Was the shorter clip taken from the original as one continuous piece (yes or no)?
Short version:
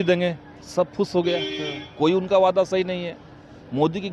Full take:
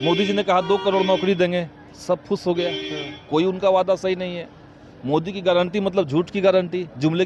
yes